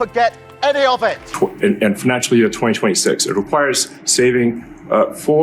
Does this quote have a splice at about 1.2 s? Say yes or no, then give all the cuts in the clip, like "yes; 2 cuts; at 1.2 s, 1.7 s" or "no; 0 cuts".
yes; 1 cut; at 1.2 s